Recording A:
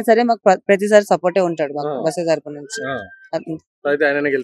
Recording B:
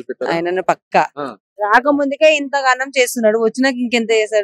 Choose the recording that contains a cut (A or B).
B